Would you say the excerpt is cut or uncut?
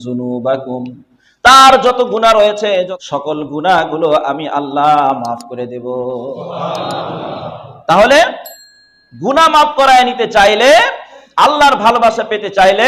cut